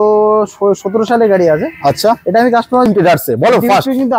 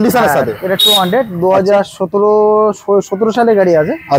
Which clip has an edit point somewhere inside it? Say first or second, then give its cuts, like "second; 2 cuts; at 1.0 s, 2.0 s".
first; 1 cut; at 2.9 s